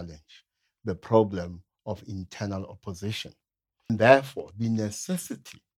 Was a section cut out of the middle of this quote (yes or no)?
yes